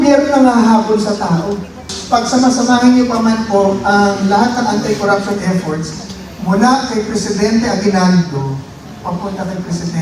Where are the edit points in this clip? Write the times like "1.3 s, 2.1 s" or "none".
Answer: 1.9 s